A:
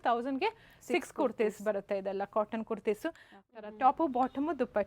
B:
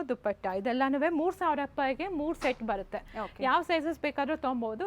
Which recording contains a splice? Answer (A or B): A